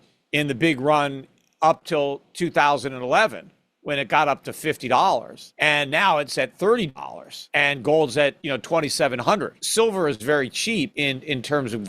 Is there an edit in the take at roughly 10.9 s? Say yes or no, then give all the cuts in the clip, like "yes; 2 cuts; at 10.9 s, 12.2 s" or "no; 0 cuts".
yes; 3 cuts; at 5.4 s, 9.6 s, 10.9 s